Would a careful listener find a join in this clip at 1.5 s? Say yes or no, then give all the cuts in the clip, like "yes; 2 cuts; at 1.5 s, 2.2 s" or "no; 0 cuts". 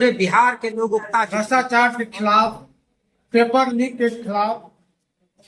yes; 1 cut; at 1.5 s